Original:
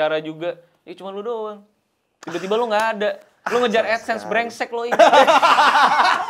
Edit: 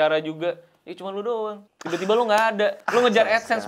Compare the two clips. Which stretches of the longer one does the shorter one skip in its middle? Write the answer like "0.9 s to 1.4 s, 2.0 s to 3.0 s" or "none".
1.7 s to 2.1 s, 3.2 s to 3.4 s

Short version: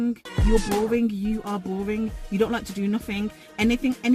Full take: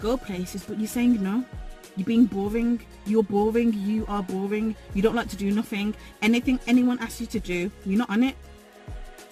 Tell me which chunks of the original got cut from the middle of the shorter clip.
none

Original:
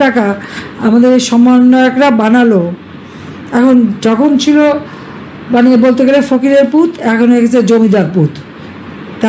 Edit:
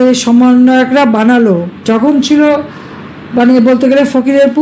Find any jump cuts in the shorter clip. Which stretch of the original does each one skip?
2.8 s to 4.0 s

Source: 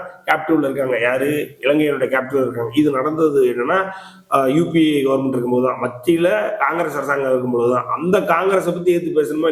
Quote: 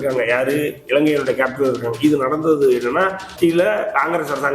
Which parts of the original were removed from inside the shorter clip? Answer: 4.0 s to 5.9 s

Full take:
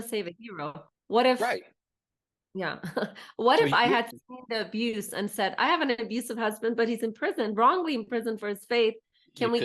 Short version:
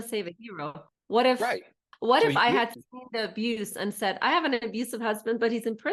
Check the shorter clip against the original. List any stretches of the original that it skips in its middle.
1.8 s to 3.2 s

